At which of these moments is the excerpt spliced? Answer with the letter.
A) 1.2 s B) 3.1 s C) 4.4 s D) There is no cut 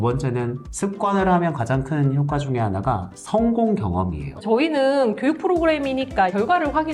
C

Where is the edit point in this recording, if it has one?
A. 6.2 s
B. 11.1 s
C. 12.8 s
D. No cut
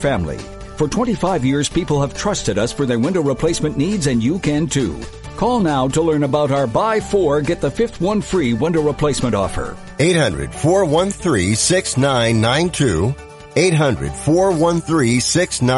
D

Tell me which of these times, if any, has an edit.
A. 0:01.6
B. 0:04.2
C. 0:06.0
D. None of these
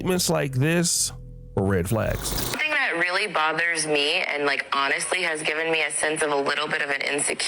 C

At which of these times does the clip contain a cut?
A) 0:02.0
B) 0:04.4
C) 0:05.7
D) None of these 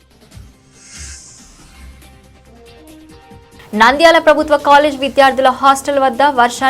A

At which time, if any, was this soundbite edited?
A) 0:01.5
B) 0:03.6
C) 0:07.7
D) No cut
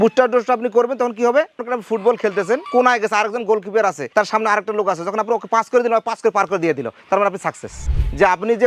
C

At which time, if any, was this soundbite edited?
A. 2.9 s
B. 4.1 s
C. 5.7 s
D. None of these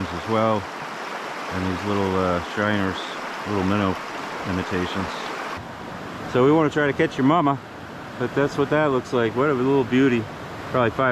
C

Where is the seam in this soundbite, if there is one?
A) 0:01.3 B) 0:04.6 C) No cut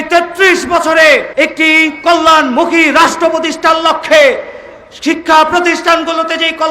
A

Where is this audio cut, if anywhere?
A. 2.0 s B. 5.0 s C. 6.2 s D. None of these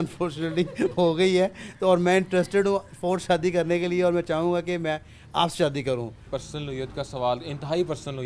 C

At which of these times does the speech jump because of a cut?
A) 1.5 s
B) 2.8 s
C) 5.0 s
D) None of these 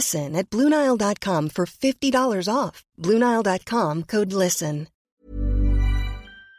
C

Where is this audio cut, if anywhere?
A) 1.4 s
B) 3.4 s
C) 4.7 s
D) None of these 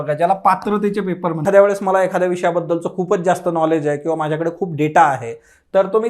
A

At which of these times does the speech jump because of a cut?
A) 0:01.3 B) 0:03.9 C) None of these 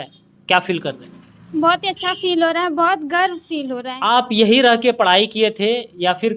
B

